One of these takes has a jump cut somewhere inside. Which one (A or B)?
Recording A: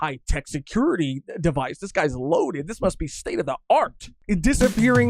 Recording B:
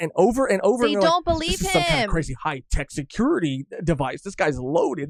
A